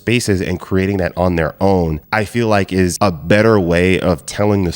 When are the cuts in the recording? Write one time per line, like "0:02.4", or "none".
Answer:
0:02.9